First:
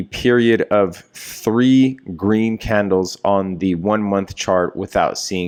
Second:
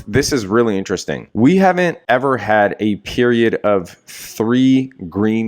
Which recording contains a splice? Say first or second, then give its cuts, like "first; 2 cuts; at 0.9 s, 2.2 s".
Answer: second; 2 cuts; at 1.2 s, 2.0 s